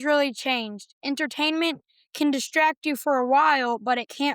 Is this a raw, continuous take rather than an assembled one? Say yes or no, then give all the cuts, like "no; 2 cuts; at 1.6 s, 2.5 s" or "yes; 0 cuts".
yes; 0 cuts